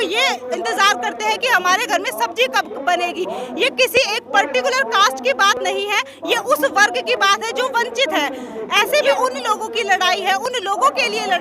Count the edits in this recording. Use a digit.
1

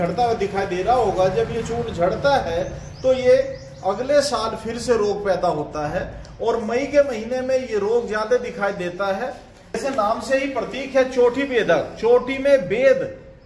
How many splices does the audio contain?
1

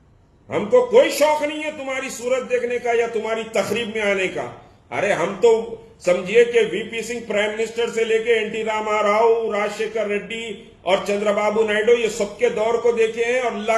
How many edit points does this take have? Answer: 0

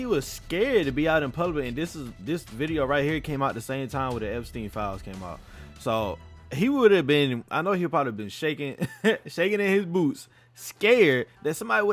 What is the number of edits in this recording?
0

